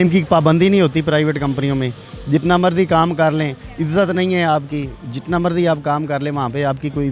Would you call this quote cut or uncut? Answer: uncut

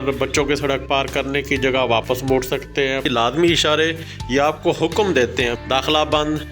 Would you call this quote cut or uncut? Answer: cut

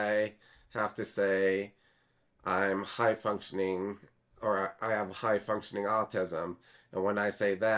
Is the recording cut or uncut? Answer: uncut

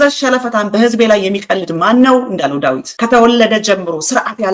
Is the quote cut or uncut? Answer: cut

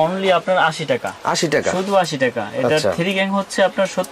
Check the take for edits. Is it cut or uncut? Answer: uncut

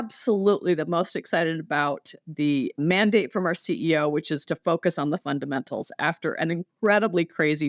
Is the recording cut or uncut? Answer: cut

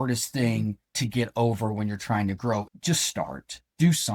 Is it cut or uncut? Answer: cut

